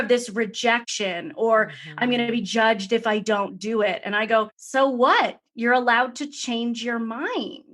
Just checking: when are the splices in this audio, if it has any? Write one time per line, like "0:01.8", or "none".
0:00.9
0:04.6